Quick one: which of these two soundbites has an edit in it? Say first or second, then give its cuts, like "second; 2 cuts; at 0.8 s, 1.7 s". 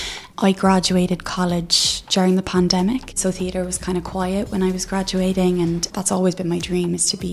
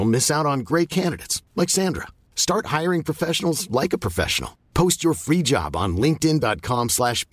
first; 2 cuts; at 3.2 s, 5.9 s